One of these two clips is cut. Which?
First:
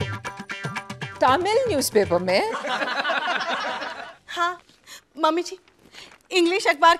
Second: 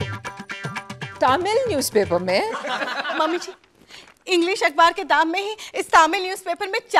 second; 1 cut; at 3.2 s

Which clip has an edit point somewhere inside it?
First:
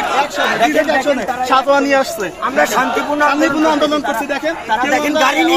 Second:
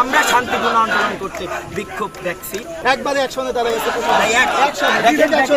second; 1 cut; at 2.7 s

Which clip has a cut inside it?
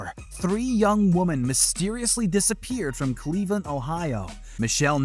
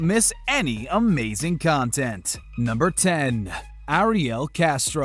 second; 1 cut; at 4.1 s

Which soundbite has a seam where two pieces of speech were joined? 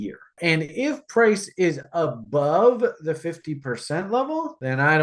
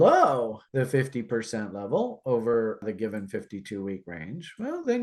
second; 1 cut; at 2.8 s

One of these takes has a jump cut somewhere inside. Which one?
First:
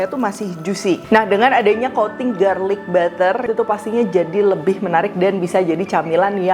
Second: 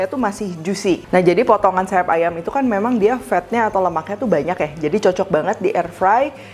first; 2 cuts; at 1.0 s, 3.5 s

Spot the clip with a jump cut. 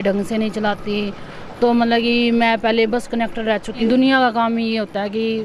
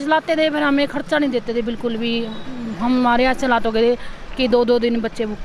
first; 1 cut; at 3.9 s

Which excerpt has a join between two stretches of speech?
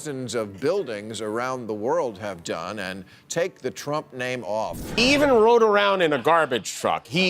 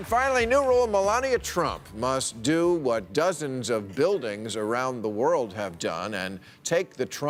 first; 1 cut; at 5.0 s

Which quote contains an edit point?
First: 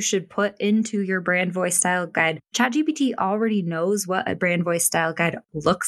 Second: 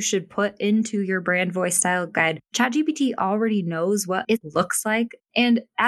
second; 1 cut; at 4.2 s

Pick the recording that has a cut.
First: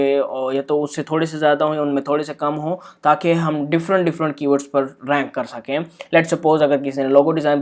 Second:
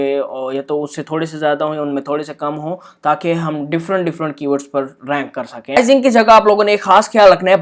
second; 1 cut; at 5.8 s

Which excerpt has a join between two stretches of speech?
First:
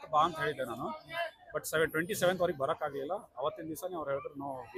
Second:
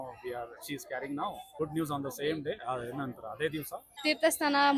second; 2 cuts; at 1.5 s, 3.8 s

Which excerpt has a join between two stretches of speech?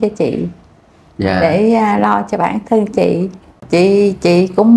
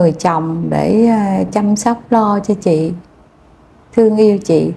first; 1 cut; at 3.6 s

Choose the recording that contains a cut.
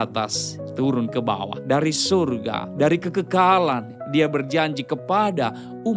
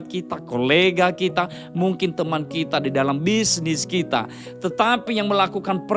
first; 2 cuts; at 1.5 s, 2.6 s

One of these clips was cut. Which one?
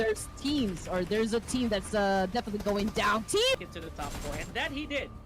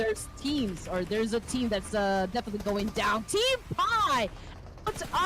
first; 1 cut; at 3.7 s

